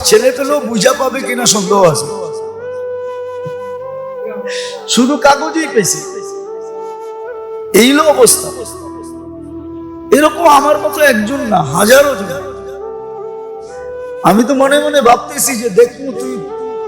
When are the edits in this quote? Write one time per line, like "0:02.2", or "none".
0:02.0
0:03.6
0:04.9
0:05.9
0:07.7
0:08.3
0:10.1